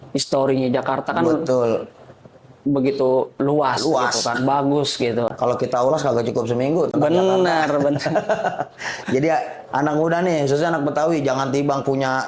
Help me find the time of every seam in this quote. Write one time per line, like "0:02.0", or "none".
none